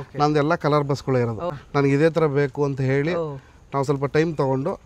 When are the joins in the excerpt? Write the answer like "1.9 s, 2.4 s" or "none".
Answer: 1.5 s